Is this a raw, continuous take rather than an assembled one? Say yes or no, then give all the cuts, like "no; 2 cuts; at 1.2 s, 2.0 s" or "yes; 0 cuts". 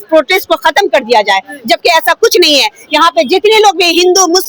yes; 0 cuts